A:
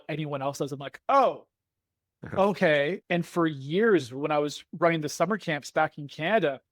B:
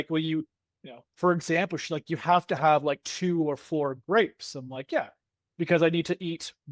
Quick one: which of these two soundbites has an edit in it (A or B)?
A